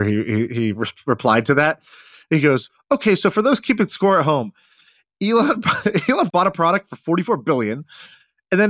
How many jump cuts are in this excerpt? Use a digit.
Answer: 1